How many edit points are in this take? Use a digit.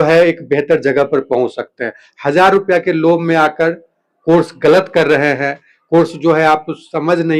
0